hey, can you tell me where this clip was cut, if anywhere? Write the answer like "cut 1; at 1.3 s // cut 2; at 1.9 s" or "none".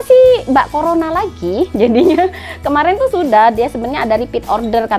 none